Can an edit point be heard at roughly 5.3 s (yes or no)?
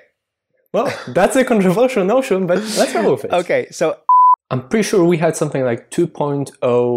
no